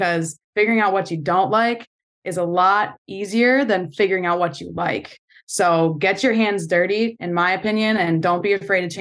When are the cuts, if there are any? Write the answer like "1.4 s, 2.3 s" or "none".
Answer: none